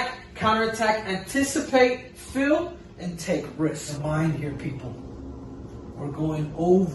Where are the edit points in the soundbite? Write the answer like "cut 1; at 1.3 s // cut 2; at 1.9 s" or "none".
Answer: cut 1; at 4.0 s